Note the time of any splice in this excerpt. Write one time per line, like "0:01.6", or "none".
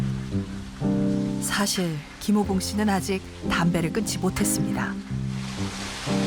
none